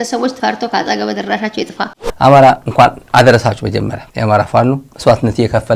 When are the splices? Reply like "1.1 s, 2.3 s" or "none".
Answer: 2.0 s